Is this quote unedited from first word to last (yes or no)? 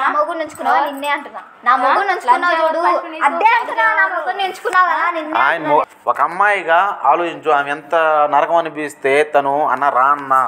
no